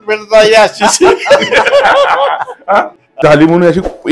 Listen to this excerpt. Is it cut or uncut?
cut